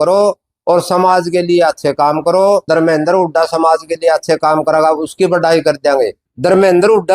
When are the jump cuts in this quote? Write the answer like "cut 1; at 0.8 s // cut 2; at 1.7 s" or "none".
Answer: cut 1; at 2.6 s // cut 2; at 6.2 s